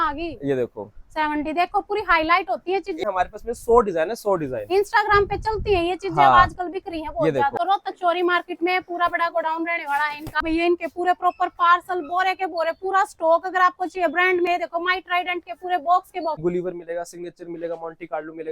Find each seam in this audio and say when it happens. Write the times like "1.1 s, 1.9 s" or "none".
3.0 s, 7.5 s, 10.4 s, 16.4 s